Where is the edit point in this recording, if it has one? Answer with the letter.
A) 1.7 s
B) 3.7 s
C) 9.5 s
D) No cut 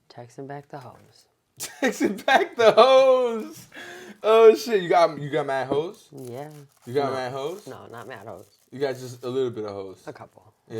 D